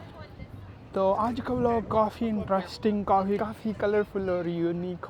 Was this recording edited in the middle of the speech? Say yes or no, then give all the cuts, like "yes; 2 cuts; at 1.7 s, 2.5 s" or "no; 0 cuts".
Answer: yes; 1 cut; at 3.4 s